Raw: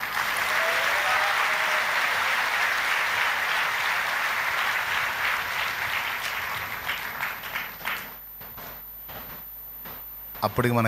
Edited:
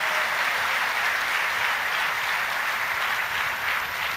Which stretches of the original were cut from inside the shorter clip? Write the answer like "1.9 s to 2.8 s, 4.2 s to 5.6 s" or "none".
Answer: none

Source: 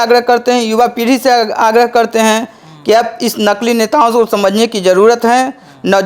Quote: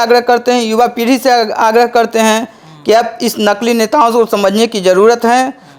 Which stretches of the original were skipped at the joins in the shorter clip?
none

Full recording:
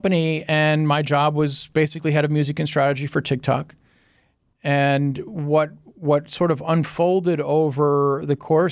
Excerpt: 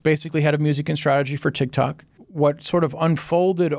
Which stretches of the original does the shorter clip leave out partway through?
3.9 s to 5.9 s

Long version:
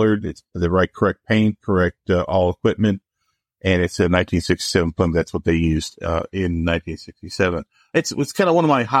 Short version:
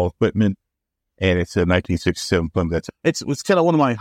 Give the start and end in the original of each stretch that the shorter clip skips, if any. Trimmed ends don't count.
5.3 s to 7.8 s

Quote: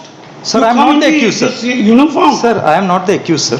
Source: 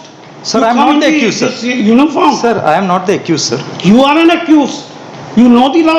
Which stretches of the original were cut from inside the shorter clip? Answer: none

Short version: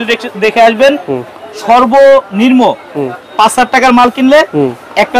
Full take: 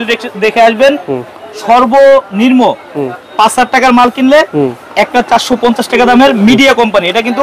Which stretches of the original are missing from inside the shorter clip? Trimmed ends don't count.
none

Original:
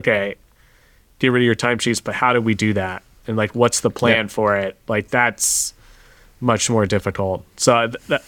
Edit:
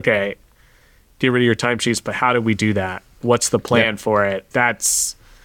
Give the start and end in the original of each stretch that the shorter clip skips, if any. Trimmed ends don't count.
3.2 s to 3.5 s, 4.8 s to 5.1 s

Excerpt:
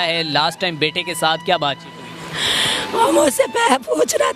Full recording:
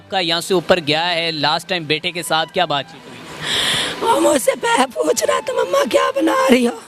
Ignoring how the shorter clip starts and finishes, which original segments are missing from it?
none

